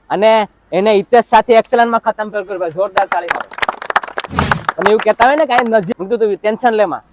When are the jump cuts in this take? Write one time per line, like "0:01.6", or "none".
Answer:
0:04.2
0:05.9